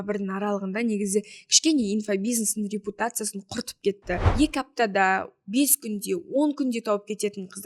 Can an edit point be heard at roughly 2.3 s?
no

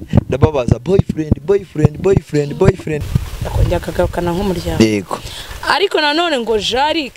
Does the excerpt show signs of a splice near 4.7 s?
no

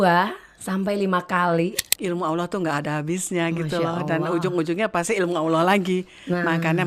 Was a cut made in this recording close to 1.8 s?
yes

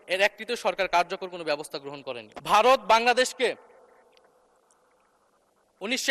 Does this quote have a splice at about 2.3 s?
yes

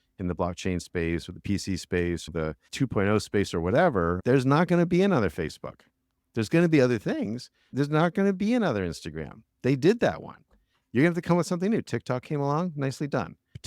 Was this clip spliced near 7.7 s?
yes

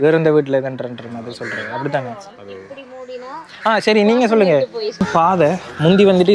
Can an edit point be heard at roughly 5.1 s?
yes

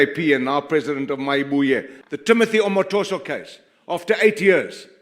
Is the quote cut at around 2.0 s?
yes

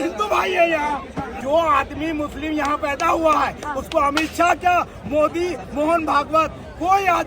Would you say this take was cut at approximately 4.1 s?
no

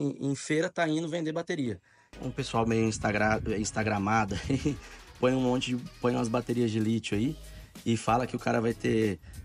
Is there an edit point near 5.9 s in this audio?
no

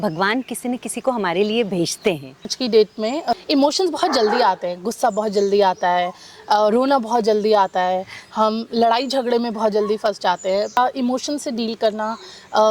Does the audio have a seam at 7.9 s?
no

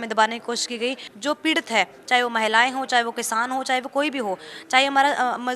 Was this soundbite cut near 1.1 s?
yes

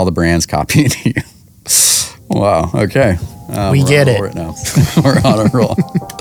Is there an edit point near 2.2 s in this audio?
no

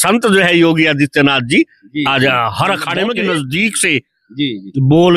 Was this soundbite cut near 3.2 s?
yes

